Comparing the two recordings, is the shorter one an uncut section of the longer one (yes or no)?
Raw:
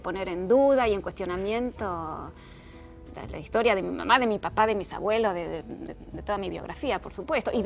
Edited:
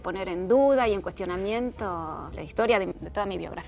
no